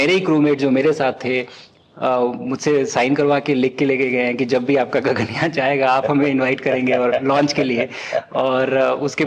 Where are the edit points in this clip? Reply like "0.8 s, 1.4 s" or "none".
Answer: none